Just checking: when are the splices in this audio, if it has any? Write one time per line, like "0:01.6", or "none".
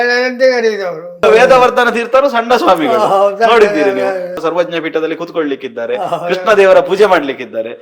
0:01.2
0:04.4